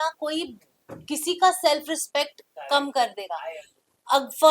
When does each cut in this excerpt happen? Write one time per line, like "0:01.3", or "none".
none